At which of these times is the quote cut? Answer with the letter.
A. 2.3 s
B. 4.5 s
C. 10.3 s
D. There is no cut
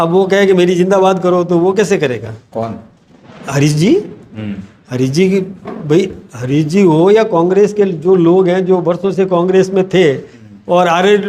D